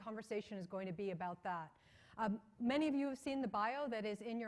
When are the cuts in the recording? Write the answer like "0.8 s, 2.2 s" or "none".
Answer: 3.2 s